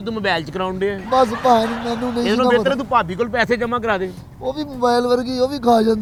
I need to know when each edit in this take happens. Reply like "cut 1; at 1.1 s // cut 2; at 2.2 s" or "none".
none